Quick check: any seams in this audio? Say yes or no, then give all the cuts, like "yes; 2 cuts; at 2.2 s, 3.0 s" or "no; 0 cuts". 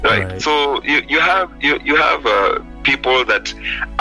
no; 0 cuts